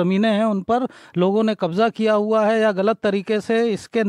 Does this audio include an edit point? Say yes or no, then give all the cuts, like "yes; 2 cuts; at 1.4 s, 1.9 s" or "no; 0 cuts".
no; 0 cuts